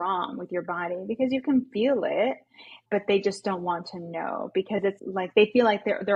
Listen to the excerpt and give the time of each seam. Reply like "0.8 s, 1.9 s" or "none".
2.6 s, 5.0 s